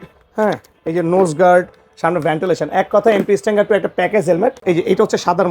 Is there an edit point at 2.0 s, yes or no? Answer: no